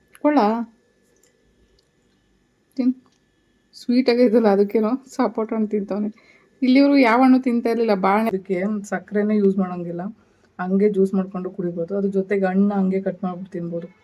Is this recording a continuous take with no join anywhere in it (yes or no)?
no